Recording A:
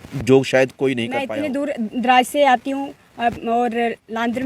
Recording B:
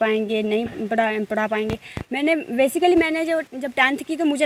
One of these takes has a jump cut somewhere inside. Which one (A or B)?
A